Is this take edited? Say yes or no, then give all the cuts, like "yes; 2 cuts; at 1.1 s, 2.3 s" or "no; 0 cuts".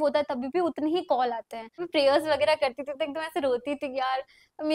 yes; 1 cut; at 1.8 s